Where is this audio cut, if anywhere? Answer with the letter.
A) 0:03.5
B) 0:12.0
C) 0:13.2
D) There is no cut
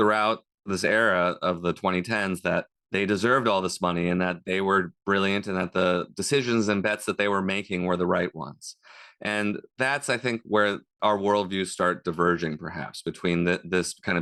D